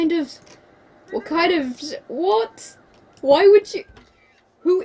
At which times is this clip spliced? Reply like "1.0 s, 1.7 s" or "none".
none